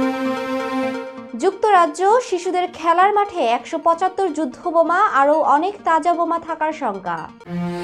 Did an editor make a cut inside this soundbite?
yes; 1 cut; at 1.1 s

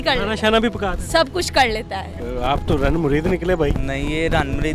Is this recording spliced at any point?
yes; 1 cut; at 2.2 s

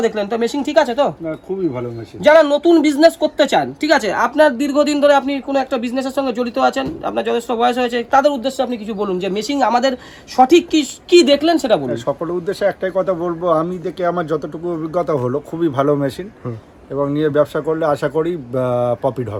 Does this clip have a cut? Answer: no; 0 cuts

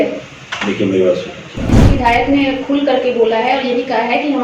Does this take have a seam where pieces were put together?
yes; 1 cut; at 1.7 s

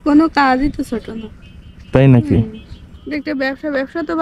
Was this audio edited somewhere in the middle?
no; 0 cuts

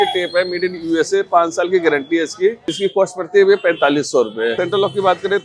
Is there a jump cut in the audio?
yes; 2 cuts; at 2.7 s, 4.5 s

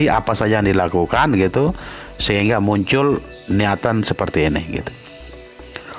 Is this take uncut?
yes; 0 cuts

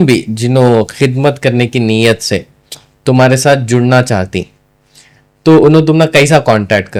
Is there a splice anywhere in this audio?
no; 0 cuts

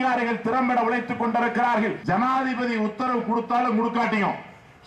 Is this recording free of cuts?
no; 1 cut; at 2.0 s

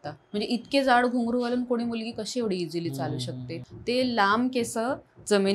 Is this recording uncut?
no; 1 cut; at 3.6 s

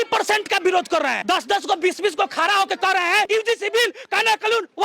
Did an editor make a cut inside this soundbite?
yes; 2 cuts; at 1.2 s, 3.3 s

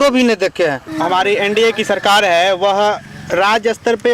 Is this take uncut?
no; 1 cut; at 0.9 s

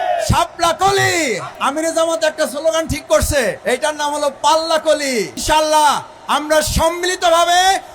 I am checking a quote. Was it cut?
yes; 3 cuts; at 1.5 s, 3.6 s, 5.4 s

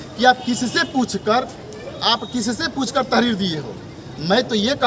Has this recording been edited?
no; 0 cuts

